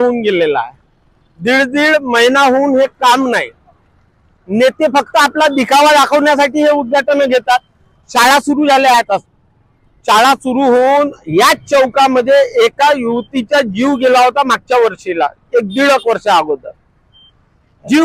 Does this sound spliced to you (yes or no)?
no